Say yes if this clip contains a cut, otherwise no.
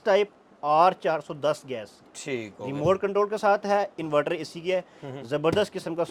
no